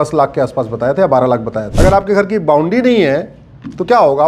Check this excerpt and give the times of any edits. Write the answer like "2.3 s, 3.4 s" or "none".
1.6 s